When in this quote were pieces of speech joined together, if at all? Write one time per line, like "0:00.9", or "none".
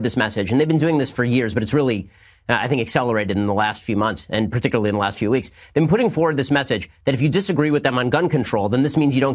none